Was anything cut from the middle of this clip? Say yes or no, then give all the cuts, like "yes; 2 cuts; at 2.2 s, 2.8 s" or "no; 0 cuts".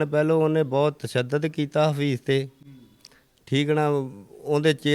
no; 0 cuts